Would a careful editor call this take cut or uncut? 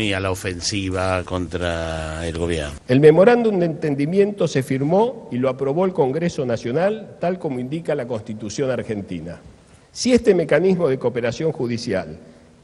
cut